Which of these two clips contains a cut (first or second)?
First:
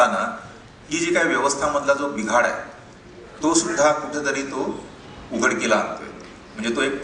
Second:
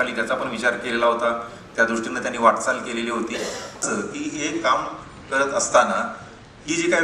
second